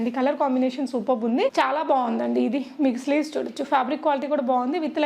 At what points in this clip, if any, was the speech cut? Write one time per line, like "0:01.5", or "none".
0:01.5